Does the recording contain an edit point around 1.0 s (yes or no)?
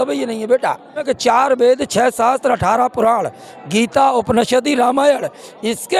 yes